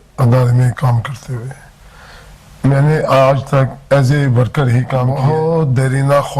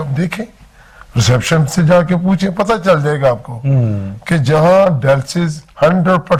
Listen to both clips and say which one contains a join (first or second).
first